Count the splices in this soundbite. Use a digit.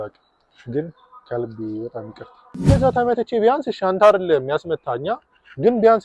1